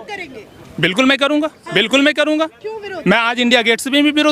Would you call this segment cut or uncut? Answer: uncut